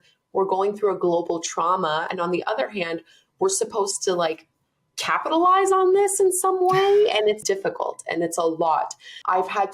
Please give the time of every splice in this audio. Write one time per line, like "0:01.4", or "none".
0:02.1
0:07.4